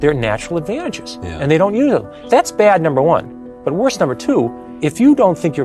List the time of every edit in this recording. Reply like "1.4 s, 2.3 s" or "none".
2.1 s, 4.6 s